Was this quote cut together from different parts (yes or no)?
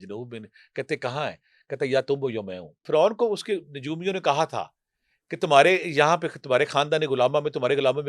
yes